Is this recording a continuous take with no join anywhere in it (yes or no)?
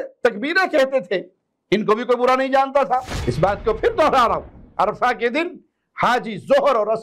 no